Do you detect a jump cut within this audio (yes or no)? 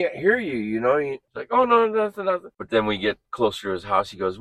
yes